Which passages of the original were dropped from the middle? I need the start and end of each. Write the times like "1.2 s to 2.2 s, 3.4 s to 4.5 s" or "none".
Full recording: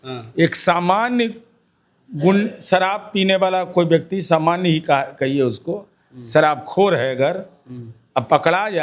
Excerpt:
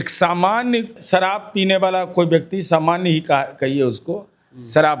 1.4 s to 2.6 s